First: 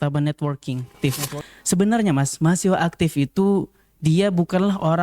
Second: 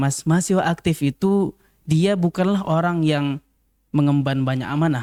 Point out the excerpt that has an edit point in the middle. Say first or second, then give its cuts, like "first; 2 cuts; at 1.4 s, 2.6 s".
first; 1 cut; at 1.0 s